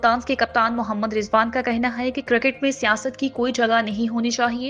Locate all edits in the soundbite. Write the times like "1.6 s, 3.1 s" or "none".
none